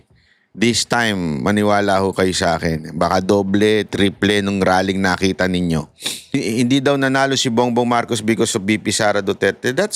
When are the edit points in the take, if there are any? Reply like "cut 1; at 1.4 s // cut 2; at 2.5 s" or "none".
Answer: cut 1; at 6.3 s